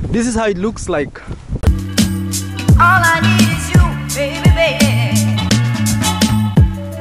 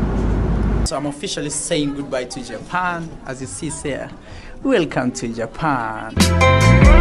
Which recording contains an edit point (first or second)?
first